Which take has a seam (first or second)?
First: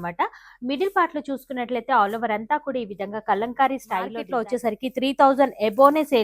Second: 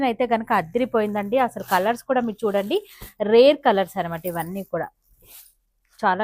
first